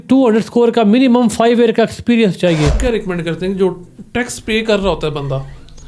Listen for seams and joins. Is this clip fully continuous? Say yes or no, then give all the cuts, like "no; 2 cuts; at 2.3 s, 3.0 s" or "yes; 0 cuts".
no; 1 cut; at 2.8 s